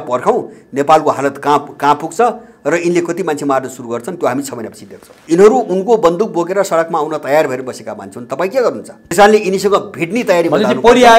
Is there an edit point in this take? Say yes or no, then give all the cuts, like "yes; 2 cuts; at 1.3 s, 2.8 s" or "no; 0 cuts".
yes; 2 cuts; at 5.1 s, 9.1 s